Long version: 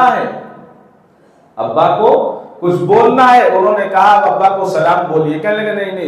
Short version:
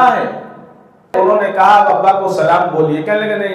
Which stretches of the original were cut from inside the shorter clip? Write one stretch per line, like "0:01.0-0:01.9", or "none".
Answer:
0:01.1-0:03.5